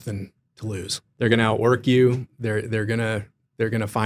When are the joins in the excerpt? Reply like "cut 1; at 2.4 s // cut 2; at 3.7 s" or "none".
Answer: cut 1; at 1.0 s